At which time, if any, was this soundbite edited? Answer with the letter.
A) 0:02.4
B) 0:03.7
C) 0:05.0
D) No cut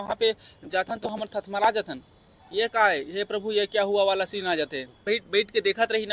C